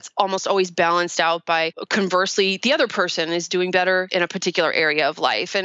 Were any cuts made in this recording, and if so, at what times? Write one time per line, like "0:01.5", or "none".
0:01.8
0:04.1